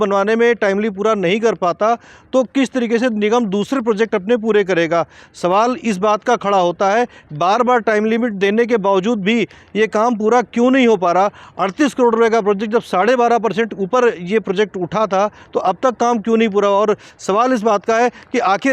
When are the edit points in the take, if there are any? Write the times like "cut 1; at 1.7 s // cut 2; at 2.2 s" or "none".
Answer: cut 1; at 17.1 s